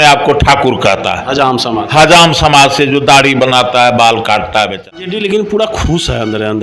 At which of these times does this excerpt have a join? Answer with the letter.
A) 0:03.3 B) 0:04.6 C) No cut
B